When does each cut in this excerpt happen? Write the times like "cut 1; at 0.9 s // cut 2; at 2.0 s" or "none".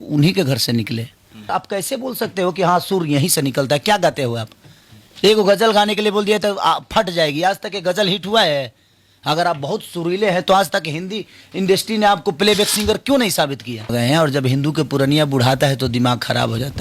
cut 1; at 1.5 s // cut 2; at 13.9 s